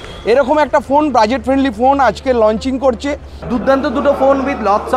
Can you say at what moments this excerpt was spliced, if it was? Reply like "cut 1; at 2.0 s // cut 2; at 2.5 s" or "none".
cut 1; at 3.3 s